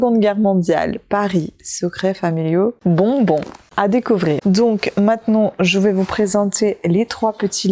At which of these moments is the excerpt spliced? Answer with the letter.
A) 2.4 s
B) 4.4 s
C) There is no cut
B